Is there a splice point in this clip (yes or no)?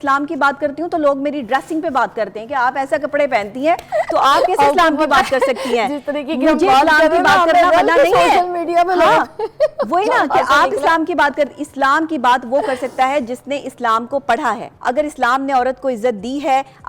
yes